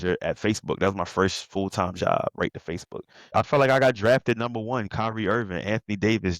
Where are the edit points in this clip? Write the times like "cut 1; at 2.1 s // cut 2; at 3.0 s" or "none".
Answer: cut 1; at 3.3 s